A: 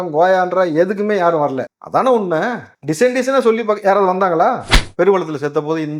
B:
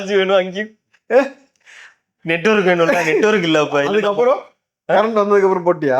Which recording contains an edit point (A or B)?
A